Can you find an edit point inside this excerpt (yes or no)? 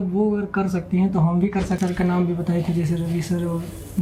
yes